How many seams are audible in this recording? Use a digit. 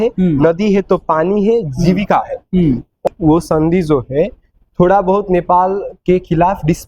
1